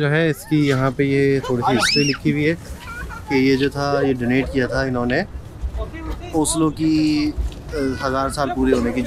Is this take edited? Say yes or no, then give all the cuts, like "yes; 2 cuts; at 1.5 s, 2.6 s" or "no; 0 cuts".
no; 0 cuts